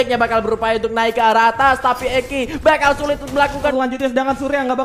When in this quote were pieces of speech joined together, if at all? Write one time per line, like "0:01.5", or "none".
0:03.7